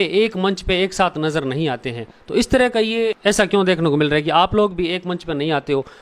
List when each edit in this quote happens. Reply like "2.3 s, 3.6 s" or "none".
3.2 s